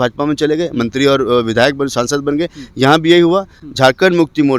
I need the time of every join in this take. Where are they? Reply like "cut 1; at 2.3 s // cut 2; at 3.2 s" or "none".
none

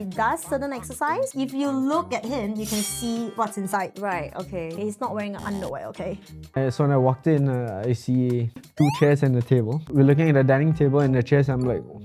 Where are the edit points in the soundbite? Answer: cut 1; at 1.3 s // cut 2; at 6.6 s // cut 3; at 8.6 s // cut 4; at 9.8 s

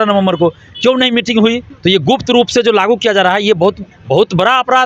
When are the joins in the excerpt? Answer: cut 1; at 1.7 s // cut 2; at 3.9 s

